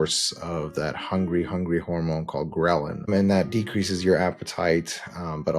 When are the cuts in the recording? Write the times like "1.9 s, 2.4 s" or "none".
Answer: 3.1 s